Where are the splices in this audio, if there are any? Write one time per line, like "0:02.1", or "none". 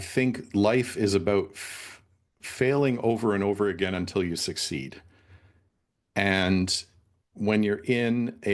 none